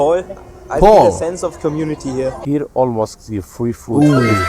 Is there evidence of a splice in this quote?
yes; 1 cut; at 2.4 s

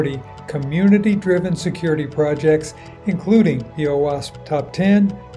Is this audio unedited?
yes; 0 cuts

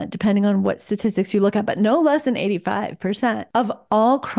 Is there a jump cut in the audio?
yes; 1 cut; at 3.4 s

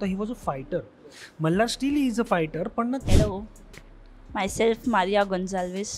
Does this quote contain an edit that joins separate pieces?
yes; 1 cut; at 3.0 s

